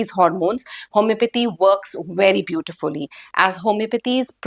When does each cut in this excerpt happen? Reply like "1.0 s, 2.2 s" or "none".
none